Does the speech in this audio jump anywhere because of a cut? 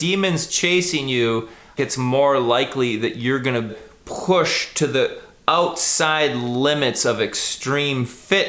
yes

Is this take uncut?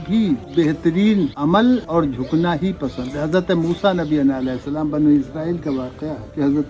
yes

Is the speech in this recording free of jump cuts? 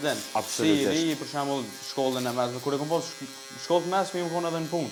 yes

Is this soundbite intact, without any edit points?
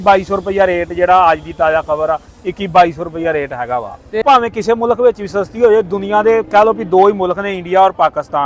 no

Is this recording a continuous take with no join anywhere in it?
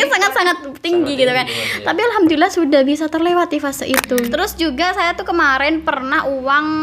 no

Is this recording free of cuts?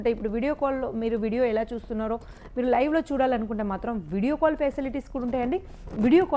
yes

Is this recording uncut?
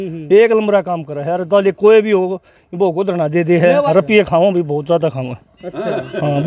no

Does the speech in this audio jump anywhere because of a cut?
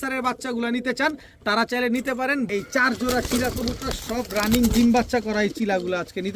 yes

